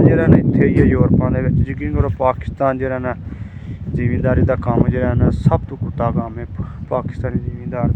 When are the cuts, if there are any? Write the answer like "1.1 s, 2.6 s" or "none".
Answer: none